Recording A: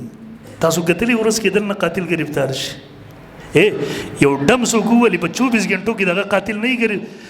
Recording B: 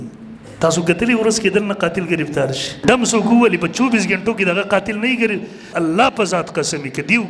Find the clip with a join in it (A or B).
B